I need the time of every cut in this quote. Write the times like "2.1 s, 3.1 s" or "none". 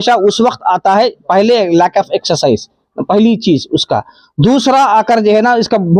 none

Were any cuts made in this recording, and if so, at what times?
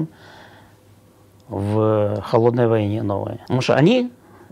3.3 s

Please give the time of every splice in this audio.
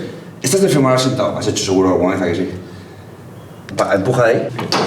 3.7 s

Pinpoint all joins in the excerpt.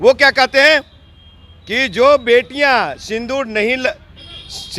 none

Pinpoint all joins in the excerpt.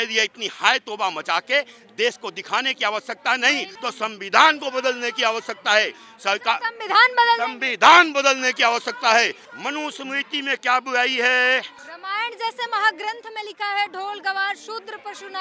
3.7 s, 9.4 s, 11.9 s

